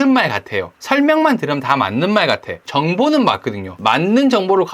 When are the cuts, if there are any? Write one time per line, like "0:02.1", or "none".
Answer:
0:02.6